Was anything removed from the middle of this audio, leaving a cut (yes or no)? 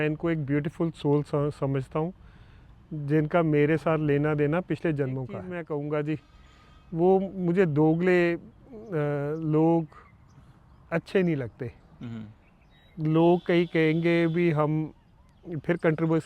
yes